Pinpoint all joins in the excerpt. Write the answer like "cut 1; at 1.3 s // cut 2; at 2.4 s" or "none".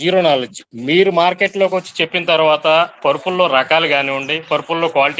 none

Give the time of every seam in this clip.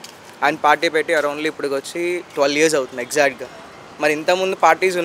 none

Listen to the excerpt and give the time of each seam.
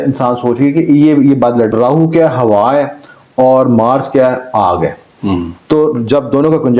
cut 1; at 1.7 s

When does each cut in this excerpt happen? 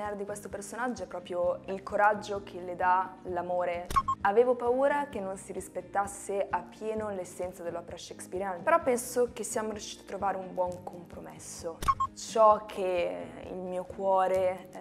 cut 1; at 1.6 s // cut 2; at 3.9 s // cut 3; at 8.6 s // cut 4; at 12.0 s

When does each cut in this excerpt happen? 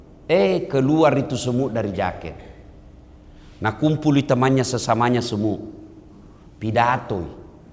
none

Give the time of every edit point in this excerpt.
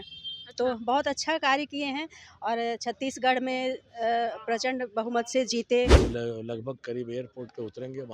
cut 1; at 6.0 s

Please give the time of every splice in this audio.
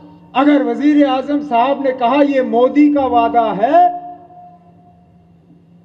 none

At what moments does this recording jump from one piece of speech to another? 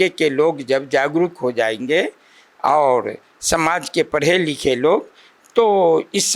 none

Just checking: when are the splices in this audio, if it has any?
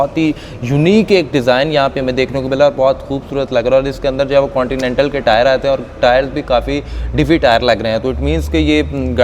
none

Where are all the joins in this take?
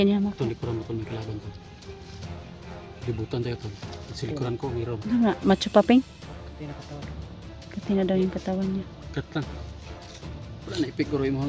cut 1; at 1.5 s // cut 2; at 3.1 s

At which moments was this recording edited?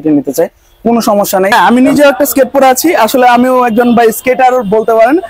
cut 1; at 1.5 s

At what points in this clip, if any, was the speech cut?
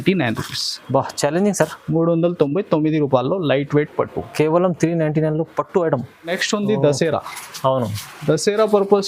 cut 1; at 6.4 s

